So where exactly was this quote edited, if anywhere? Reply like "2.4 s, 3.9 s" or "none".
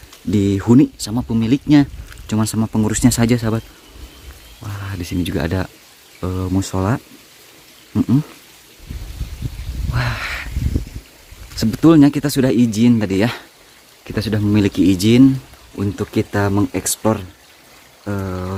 none